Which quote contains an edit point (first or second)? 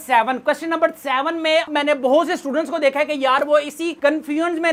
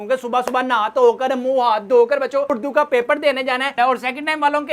second